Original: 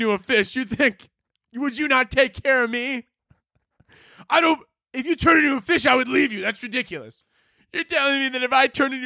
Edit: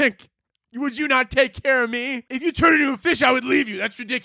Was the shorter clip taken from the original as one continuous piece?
no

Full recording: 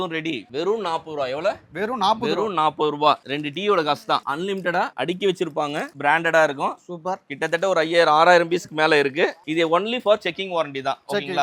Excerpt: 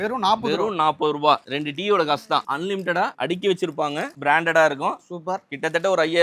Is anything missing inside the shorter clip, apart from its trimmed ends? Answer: no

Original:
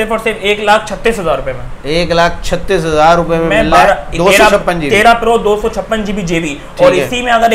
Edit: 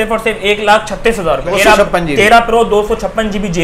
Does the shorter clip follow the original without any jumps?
no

